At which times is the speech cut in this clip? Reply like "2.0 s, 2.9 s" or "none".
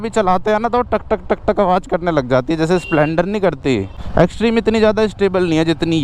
4.0 s